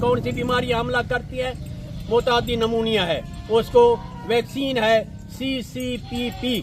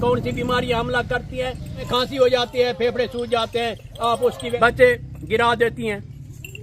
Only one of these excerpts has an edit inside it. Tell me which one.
second; 2 cuts; at 1.9 s, 4.6 s

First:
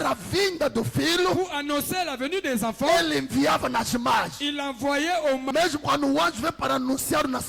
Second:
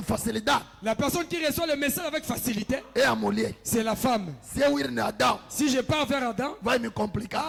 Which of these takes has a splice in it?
first; 1 cut; at 5.4 s

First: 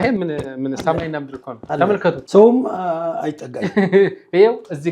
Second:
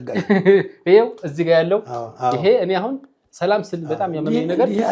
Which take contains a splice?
first; 1 cut; at 2.2 s

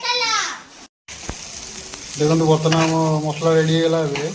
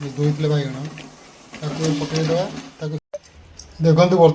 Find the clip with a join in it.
second; 1 cut; at 3.0 s

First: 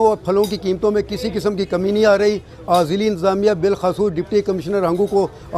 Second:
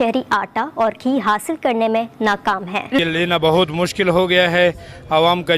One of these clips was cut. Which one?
second; 1 cut; at 3.0 s

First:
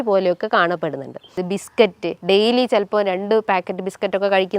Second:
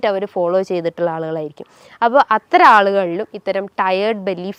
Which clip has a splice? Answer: first; 1 cut; at 1.4 s

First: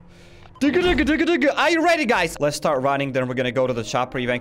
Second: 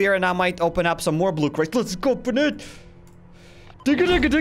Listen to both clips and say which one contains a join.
first; 1 cut; at 2.3 s

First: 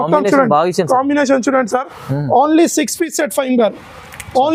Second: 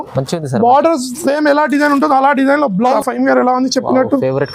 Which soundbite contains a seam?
second; 1 cut; at 2.9 s

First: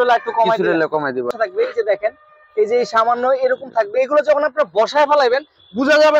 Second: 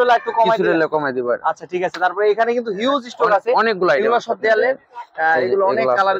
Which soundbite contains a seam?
first; 1 cut; at 1.3 s

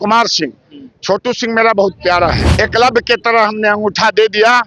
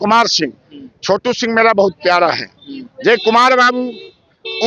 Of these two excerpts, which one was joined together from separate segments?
first; 1 cut; at 2.4 s

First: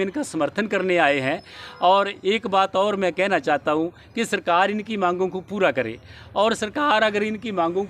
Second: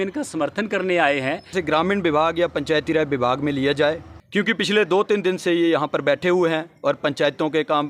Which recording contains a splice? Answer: second; 2 cuts; at 1.5 s, 4.1 s

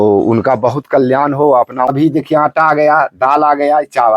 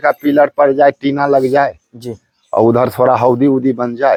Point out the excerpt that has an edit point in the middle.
first; 1 cut; at 1.9 s

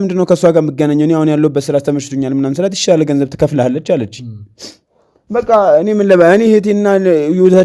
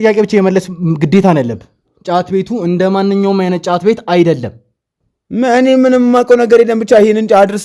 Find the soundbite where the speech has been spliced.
second; 1 cut; at 1.9 s

